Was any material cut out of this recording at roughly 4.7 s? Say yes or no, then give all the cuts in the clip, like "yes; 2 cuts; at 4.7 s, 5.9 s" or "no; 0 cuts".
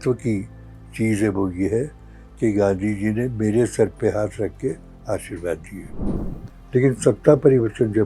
no; 1 cut; at 6.1 s